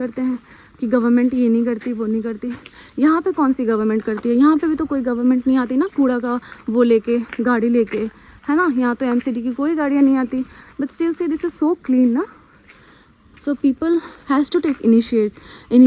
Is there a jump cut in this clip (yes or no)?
no